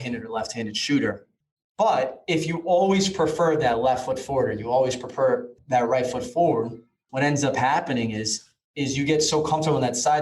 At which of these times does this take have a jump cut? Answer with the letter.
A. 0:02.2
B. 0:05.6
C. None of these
B